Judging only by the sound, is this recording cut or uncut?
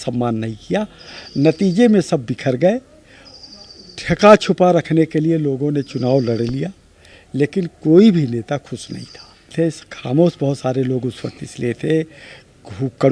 cut